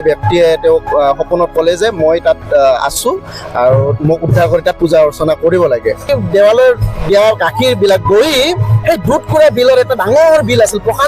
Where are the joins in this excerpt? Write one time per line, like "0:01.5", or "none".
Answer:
0:06.1